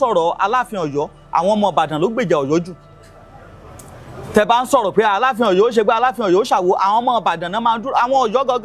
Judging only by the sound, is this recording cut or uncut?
uncut